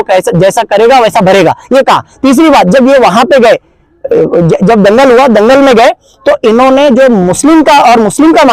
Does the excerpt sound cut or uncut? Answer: uncut